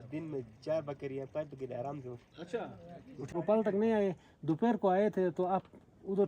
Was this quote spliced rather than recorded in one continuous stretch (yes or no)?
yes